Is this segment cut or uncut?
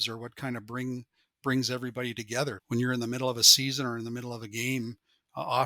cut